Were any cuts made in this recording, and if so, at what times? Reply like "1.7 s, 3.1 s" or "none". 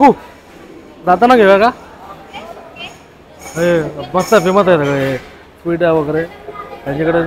none